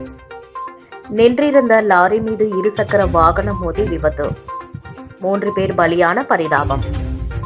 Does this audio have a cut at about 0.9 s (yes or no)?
yes